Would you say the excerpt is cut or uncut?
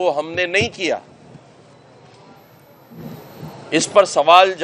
uncut